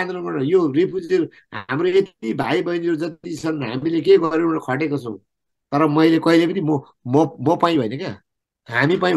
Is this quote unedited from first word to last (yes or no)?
yes